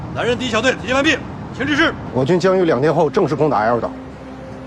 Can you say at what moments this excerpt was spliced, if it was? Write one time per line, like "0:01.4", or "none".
0:02.0